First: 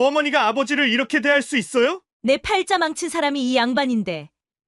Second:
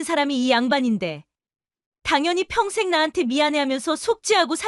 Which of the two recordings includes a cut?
first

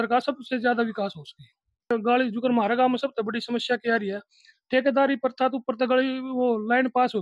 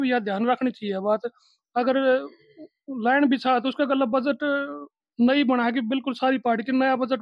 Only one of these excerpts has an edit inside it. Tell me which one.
first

